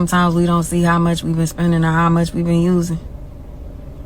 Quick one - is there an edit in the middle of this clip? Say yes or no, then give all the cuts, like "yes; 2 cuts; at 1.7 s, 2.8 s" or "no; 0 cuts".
yes; 1 cut; at 1.5 s